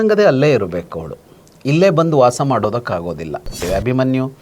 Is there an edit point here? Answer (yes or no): yes